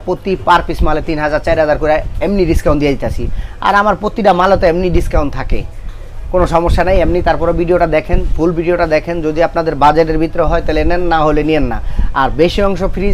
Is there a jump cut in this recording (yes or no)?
no